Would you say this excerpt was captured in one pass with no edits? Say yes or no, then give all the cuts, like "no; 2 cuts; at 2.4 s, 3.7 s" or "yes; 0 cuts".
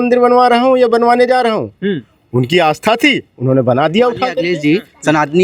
no; 1 cut; at 4.4 s